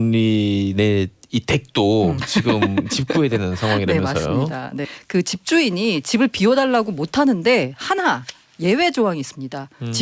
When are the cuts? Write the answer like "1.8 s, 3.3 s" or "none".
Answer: 4.9 s